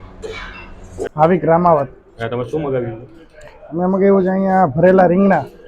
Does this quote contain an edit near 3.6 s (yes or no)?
no